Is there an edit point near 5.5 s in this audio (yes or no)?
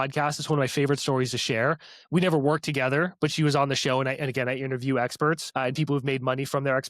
yes